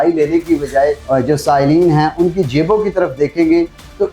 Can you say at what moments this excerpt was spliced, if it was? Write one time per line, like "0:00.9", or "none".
0:01.0